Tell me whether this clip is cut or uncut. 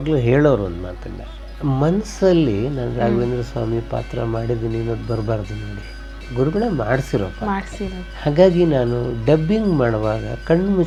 uncut